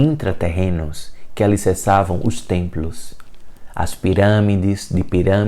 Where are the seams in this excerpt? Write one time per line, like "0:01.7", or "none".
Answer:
none